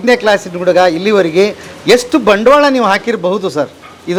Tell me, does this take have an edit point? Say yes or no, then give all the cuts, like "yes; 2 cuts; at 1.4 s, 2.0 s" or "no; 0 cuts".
no; 0 cuts